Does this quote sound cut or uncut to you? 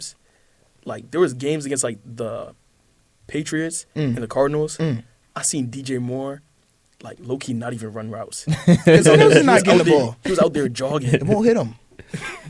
uncut